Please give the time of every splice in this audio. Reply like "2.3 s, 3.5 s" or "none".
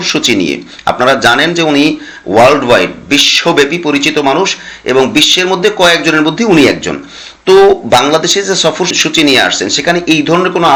none